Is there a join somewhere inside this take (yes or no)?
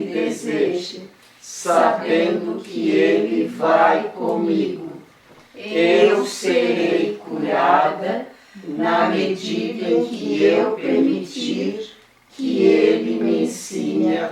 no